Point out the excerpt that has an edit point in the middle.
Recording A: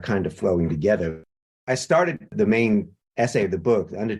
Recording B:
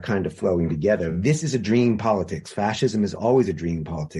B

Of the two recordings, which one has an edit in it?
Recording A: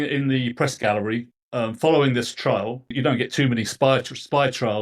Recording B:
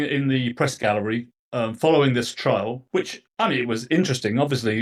A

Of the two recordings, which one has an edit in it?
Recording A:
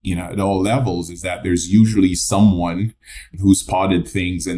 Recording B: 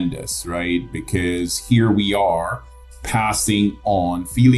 A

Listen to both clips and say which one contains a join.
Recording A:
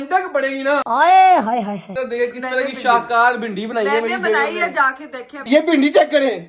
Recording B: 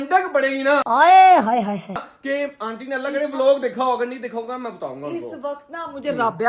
A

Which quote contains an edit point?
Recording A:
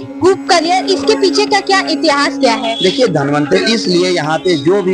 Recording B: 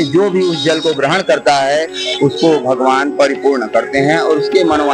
A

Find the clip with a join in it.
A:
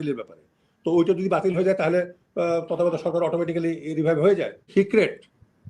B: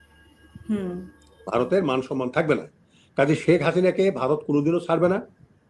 A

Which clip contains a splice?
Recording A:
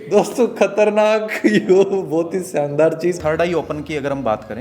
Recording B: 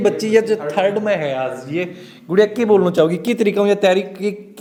A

